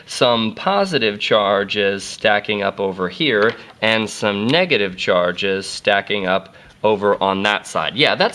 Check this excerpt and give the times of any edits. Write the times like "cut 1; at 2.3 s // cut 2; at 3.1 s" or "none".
none